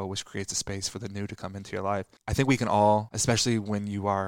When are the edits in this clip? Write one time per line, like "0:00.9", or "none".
0:02.2
0:03.1